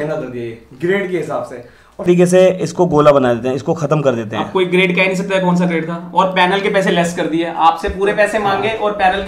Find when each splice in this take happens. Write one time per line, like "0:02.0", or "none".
0:02.1